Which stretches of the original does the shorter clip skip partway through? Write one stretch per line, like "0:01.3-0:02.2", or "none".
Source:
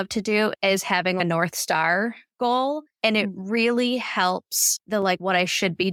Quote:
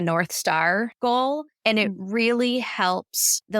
0:02.2-0:02.3